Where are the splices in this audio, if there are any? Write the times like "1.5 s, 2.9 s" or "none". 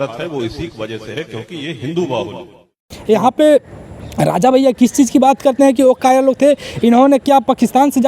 2.8 s